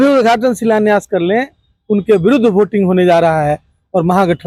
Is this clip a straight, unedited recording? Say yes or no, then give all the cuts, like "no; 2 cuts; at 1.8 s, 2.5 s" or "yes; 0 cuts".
yes; 0 cuts